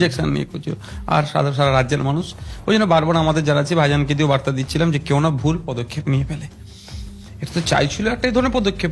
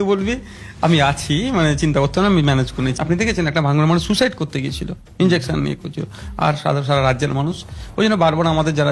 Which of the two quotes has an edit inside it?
second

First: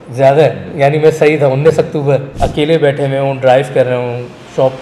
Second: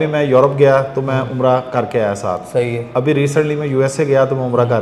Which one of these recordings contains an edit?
first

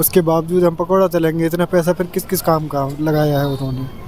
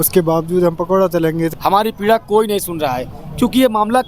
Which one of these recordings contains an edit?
second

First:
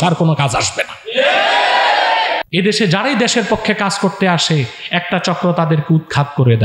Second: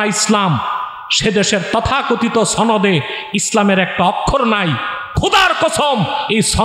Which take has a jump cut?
first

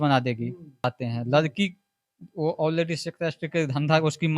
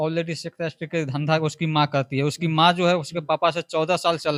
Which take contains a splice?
first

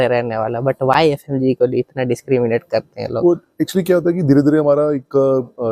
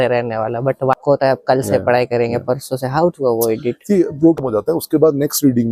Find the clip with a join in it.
second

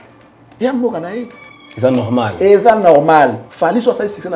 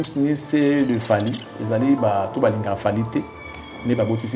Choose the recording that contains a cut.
first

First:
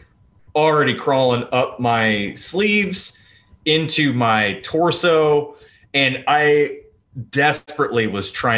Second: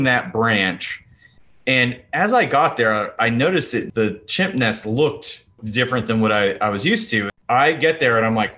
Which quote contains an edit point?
second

